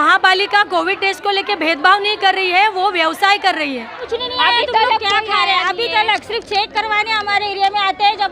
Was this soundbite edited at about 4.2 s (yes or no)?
yes